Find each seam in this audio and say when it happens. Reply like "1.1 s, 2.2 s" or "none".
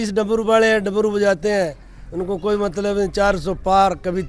none

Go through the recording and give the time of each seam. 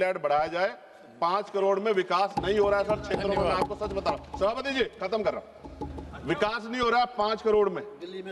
none

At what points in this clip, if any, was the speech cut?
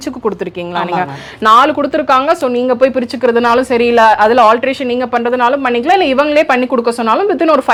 none

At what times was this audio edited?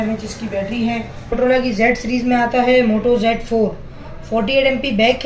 1.3 s

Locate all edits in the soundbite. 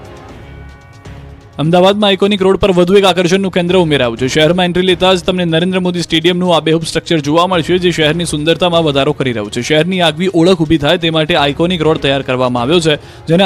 none

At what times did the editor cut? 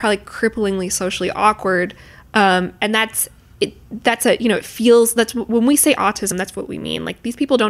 none

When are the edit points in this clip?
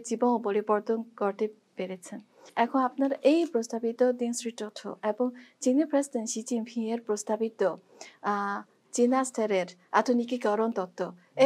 2.4 s

